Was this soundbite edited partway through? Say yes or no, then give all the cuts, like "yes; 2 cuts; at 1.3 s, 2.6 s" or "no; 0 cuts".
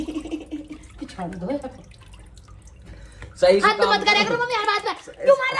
no; 0 cuts